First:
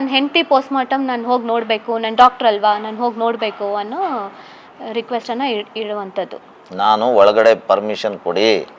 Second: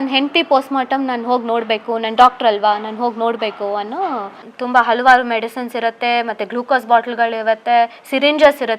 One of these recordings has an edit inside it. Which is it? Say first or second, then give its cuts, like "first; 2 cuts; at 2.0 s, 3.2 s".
second; 1 cut; at 4.5 s